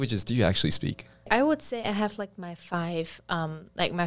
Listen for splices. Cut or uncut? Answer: cut